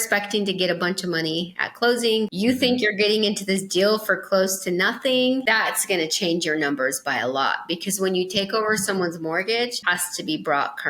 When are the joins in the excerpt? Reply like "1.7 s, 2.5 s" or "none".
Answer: 2.3 s, 5.4 s, 9.8 s